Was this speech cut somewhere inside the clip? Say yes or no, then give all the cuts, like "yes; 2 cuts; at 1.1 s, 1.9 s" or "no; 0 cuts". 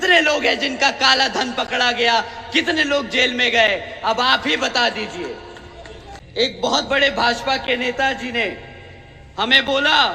no; 0 cuts